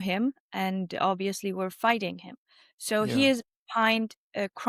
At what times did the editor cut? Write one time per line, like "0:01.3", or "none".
none